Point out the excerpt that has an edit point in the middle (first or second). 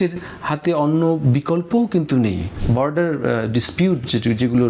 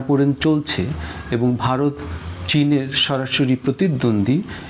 first